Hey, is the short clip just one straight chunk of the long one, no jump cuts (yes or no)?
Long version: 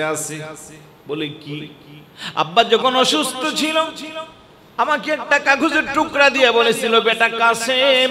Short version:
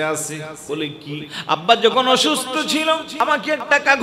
no